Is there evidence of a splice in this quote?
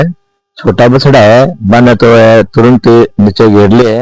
no; 0 cuts

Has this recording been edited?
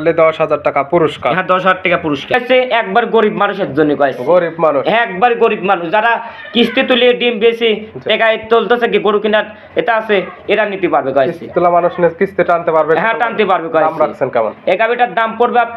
yes; 1 cut; at 2.4 s

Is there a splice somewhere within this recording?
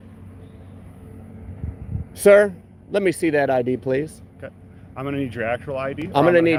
no; 0 cuts

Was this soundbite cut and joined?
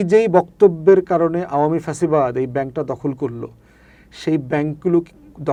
no; 0 cuts

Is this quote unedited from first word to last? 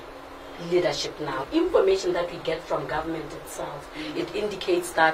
no; 1 cut; at 1.4 s

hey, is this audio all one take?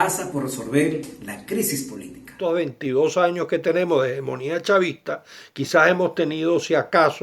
no; 1 cut; at 2.4 s

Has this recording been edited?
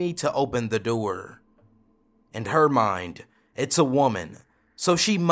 no; 0 cuts

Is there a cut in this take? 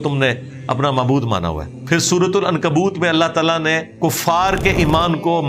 yes; 2 cuts; at 1.7 s, 3.9 s

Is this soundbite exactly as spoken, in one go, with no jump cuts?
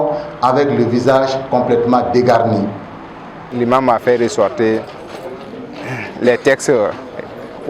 no; 1 cut; at 3.4 s

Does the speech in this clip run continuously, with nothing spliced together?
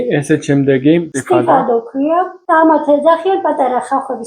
no; 1 cut; at 1.1 s

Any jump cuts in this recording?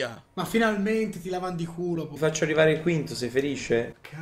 yes; 1 cut; at 2.1 s

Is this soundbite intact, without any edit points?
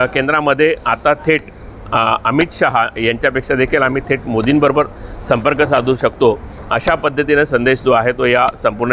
yes; 0 cuts

